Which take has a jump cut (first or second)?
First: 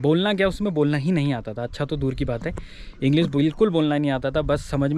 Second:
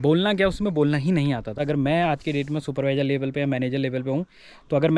second